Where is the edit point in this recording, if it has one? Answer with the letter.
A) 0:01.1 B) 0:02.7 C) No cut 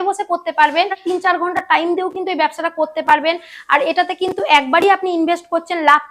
A